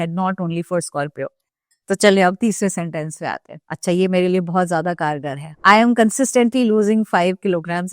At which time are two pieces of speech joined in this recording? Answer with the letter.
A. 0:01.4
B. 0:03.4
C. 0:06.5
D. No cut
A